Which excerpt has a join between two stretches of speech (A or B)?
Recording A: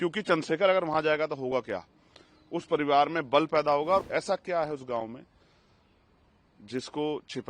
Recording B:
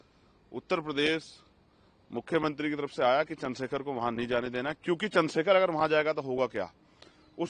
A